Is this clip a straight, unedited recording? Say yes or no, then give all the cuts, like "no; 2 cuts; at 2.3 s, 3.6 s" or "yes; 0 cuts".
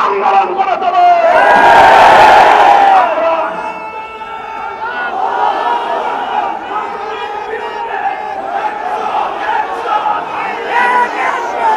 yes; 0 cuts